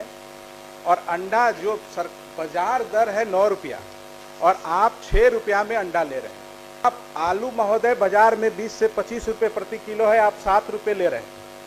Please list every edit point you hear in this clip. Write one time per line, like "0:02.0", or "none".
0:06.8